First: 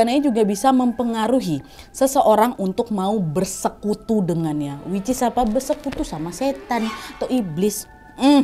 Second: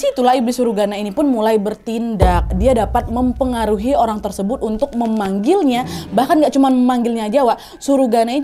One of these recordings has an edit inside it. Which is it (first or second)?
second